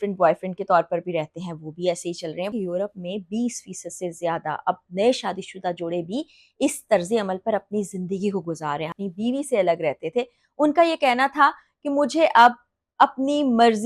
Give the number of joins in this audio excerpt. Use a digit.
2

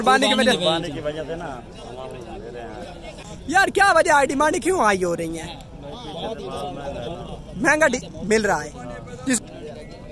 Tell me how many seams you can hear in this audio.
2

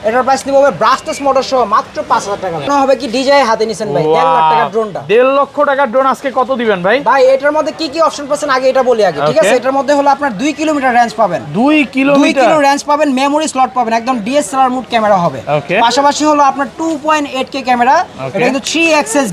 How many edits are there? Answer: 1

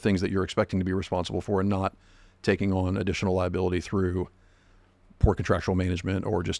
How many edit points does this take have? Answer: 0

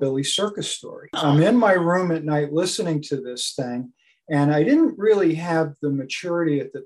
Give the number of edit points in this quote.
1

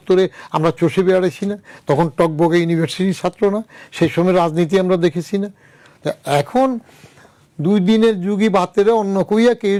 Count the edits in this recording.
0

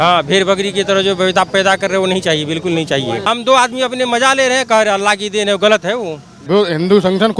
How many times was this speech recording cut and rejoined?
2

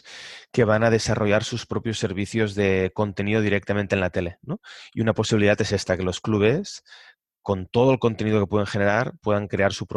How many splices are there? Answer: 0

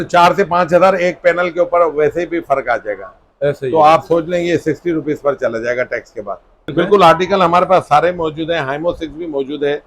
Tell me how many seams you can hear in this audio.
1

